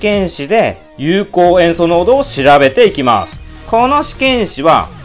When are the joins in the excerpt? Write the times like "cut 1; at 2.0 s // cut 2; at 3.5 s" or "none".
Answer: none